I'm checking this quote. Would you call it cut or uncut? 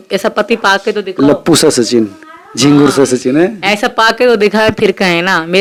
uncut